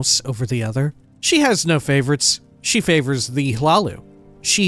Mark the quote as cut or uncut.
cut